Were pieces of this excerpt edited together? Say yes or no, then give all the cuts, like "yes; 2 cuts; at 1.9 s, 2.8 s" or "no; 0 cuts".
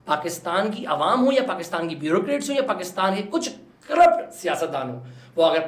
no; 0 cuts